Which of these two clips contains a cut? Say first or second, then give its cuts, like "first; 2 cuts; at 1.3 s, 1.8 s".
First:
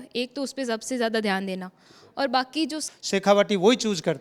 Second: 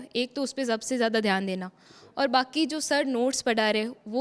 first; 1 cut; at 2.8 s